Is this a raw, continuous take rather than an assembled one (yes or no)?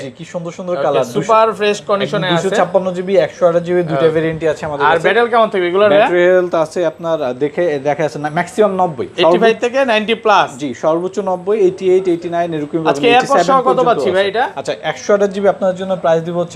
yes